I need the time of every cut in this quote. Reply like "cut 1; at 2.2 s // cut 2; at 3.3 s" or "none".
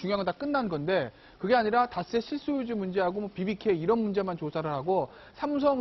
cut 1; at 2.9 s